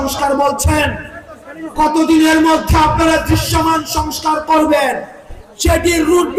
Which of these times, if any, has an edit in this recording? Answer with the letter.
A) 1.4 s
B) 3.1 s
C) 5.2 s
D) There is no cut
D